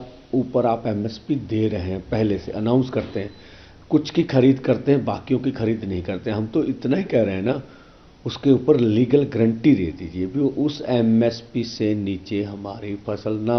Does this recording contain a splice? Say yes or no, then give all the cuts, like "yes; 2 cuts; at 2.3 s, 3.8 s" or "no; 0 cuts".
no; 0 cuts